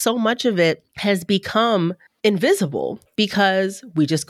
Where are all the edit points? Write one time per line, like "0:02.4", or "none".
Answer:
0:00.9
0:02.0
0:03.0